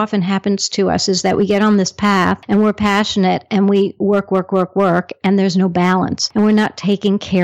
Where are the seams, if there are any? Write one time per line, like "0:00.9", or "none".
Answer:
0:02.4
0:06.2